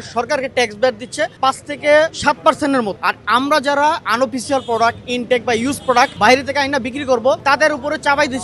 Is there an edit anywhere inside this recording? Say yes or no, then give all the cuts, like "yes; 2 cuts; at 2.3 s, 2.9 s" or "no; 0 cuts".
yes; 5 cuts; at 1.3 s, 2.2 s, 3.0 s, 6.1 s, 7.4 s